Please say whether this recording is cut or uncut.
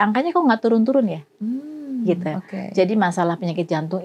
uncut